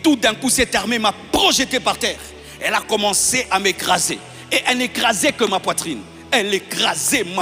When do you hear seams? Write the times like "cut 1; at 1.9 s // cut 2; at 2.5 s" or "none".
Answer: none